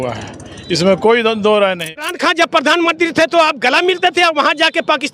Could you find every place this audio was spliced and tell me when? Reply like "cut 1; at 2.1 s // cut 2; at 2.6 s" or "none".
cut 1; at 2.1 s